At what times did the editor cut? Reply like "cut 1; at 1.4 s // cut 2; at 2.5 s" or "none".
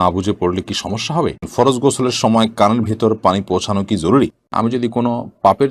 cut 1; at 1.5 s // cut 2; at 4.4 s